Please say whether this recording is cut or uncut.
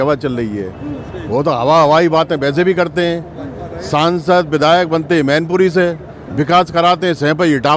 uncut